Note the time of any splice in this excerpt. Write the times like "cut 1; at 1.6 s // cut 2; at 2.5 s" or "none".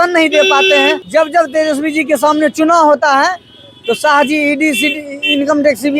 cut 1; at 1.0 s